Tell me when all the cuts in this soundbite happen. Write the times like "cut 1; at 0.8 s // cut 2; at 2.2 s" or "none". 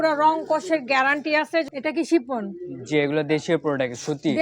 cut 1; at 1.7 s